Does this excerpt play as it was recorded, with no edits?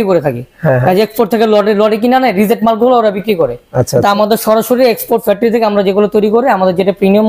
yes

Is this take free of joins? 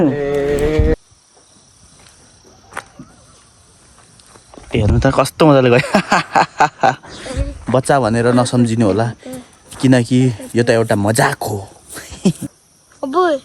no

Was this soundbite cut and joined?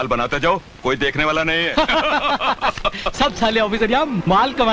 no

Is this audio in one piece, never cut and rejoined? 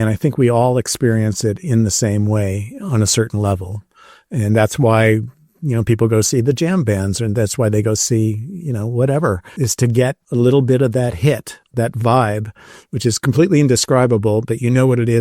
no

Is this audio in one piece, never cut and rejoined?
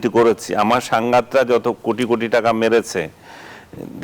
yes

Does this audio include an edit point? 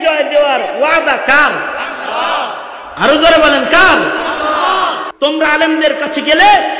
yes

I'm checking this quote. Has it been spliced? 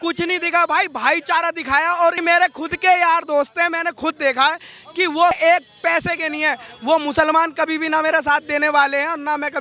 yes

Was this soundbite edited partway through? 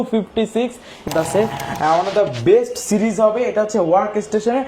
yes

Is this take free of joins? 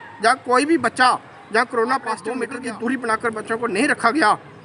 no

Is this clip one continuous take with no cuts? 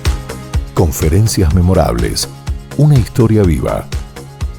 yes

